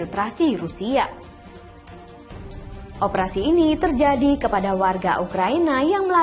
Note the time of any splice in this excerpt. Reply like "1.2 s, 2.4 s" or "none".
none